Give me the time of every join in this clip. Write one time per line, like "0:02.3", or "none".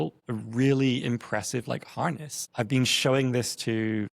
0:02.4